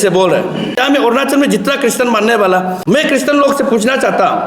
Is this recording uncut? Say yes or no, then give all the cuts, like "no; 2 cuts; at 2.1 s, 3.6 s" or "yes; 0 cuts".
no; 2 cuts; at 0.8 s, 2.8 s